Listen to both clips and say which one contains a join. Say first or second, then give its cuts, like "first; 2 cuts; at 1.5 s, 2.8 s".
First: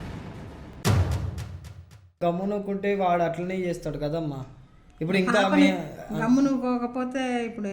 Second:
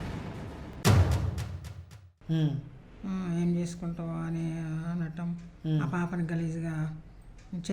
first; 1 cut; at 2.2 s